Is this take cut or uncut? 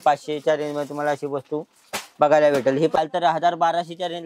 cut